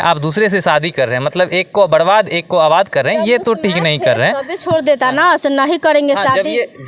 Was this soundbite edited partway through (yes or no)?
no